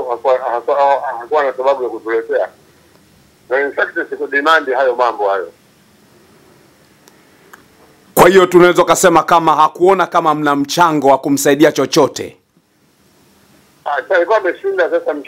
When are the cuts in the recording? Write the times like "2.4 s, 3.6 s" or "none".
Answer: none